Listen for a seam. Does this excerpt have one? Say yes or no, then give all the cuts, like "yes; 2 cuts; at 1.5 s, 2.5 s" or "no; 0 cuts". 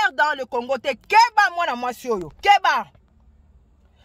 no; 0 cuts